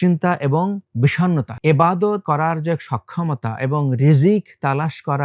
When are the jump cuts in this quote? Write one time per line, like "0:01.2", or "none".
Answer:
0:01.2
0:02.2